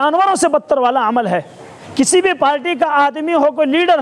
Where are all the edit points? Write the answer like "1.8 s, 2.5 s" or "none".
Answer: 1.8 s